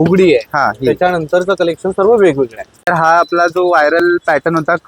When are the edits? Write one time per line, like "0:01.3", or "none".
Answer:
0:02.8